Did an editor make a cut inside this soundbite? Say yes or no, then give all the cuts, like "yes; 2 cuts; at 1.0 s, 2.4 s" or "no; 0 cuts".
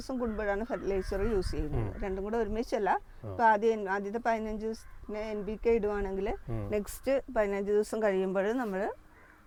no; 0 cuts